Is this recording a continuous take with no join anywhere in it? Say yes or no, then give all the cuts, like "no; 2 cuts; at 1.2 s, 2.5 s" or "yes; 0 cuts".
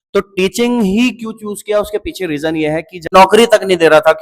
no; 1 cut; at 3.1 s